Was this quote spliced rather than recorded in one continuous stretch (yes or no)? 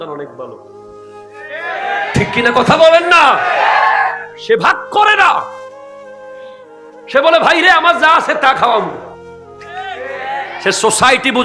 yes